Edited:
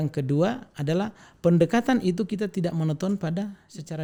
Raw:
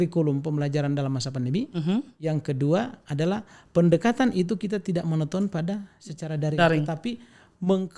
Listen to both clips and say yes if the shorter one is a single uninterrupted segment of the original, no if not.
yes